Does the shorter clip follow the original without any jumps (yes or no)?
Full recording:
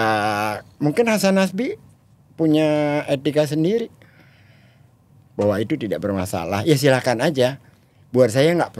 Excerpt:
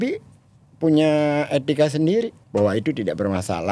no